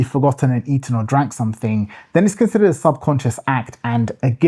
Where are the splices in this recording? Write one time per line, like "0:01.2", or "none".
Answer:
none